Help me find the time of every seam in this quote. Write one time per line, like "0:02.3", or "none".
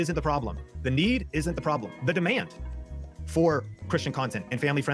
none